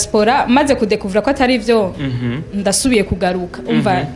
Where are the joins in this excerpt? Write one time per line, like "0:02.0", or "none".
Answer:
none